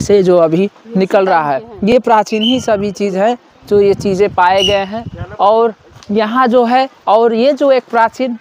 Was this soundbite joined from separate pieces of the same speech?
no; 0 cuts

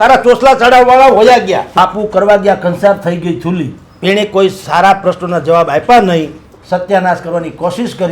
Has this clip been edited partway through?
yes; 1 cut; at 1.7 s

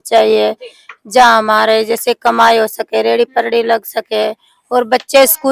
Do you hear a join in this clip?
no; 0 cuts

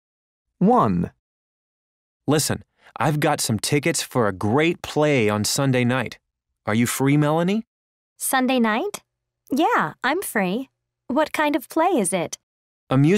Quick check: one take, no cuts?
no; 1 cut; at 3.4 s

